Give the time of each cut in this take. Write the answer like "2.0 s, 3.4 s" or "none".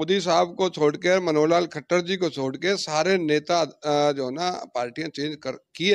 none

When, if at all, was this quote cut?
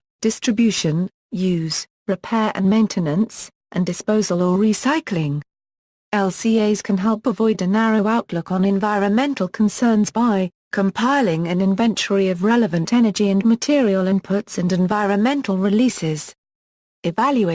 1.2 s

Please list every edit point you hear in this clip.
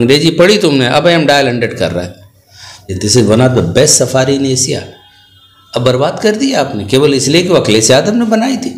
2.9 s

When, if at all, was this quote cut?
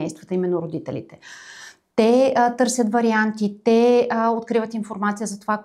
none

